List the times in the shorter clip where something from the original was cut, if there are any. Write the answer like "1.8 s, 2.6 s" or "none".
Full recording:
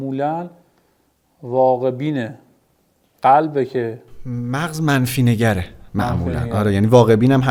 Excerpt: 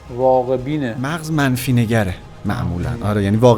1.1 s